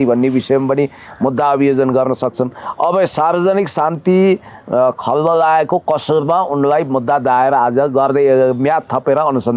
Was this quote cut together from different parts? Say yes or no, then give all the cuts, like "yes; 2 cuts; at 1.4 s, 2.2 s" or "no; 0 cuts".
no; 0 cuts